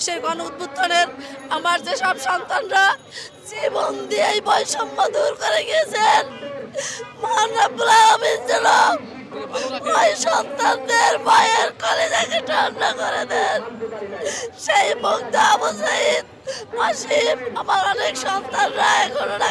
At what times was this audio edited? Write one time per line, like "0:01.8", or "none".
none